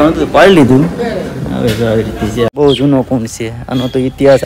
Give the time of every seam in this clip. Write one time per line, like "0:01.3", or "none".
0:02.5